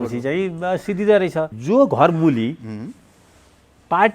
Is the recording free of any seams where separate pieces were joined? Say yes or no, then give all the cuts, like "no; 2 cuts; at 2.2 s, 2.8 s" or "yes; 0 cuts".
no; 1 cut; at 1.6 s